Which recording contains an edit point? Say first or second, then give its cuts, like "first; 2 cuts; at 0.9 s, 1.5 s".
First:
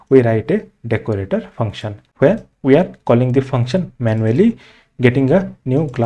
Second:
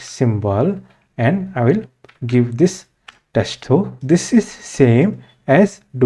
first; 1 cut; at 2.1 s